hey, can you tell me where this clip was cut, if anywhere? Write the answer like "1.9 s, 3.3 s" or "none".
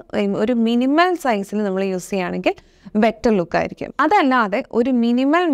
3.8 s